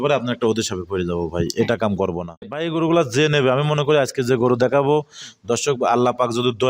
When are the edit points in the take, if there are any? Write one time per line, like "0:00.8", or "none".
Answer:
0:02.6